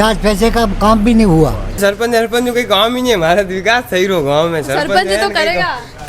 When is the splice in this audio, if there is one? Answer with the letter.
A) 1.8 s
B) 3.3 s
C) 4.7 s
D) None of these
A